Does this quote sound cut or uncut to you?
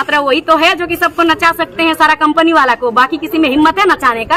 uncut